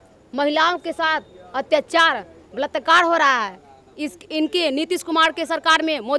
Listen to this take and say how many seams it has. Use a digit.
0